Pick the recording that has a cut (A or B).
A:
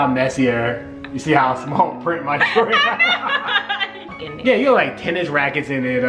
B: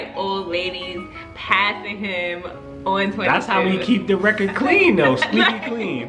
A